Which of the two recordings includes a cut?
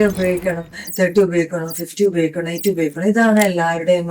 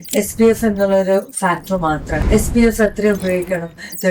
second; 1 cut; at 2.1 s

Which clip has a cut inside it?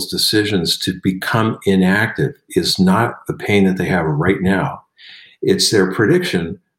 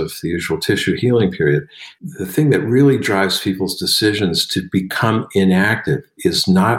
second; 1 cut; at 1.9 s

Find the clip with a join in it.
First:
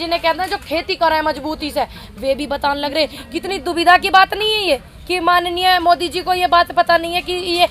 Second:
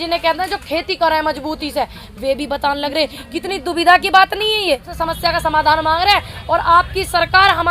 second; 1 cut; at 4.9 s

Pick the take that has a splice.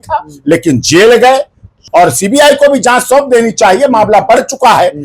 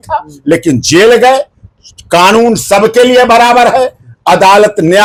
first; 1 cut; at 1.7 s

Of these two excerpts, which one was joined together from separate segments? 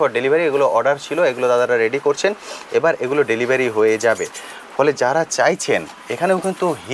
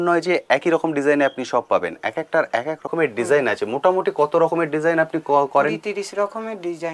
second; 1 cut; at 2.9 s

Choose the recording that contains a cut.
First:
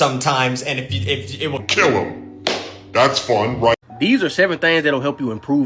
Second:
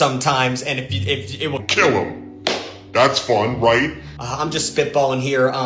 first; 1 cut; at 3.8 s

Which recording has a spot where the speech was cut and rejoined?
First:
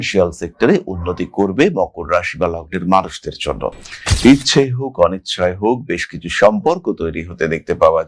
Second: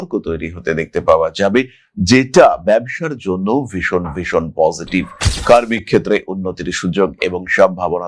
first; 1 cut; at 4.0 s

